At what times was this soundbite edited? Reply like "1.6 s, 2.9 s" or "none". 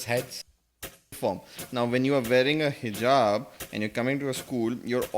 1.0 s